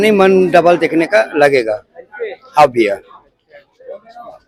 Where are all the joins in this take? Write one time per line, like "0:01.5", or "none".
none